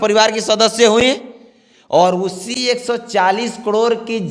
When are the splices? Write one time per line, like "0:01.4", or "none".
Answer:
none

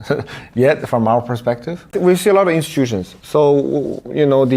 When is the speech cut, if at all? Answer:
0:01.9

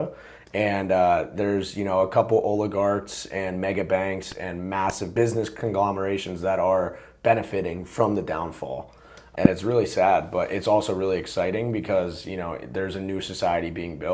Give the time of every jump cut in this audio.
0:05.0
0:09.2

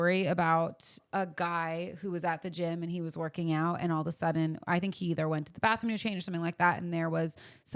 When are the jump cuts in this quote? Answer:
0:01.0

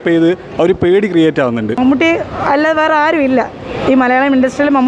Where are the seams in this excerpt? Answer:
0:01.8

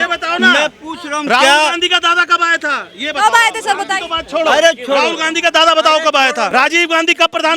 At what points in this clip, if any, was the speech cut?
0:06.5

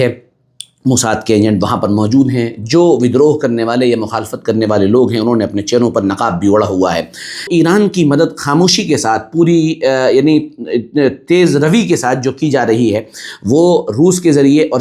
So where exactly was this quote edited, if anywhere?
0:07.5

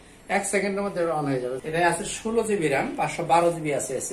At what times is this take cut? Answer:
0:01.6

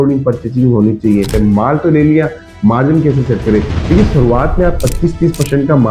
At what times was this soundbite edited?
0:01.3

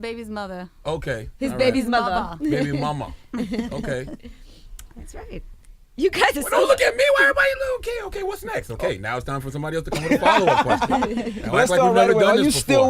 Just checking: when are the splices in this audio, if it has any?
0:08.4

